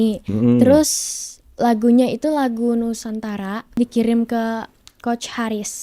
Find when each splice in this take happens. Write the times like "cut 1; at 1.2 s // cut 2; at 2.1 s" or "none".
cut 1; at 3.7 s